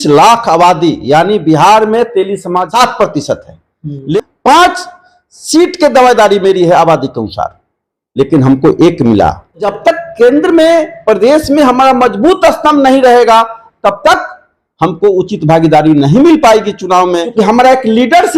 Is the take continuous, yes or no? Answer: no